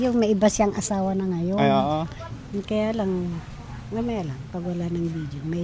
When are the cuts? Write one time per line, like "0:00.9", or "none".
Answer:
0:02.2